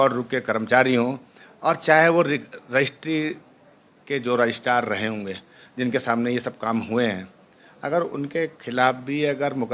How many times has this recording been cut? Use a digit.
0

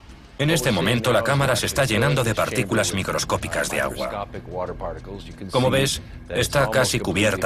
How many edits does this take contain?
1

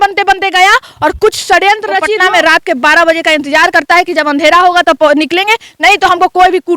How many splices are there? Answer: 1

